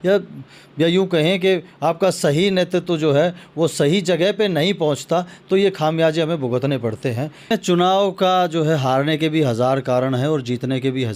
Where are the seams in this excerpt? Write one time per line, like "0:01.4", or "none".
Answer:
0:07.5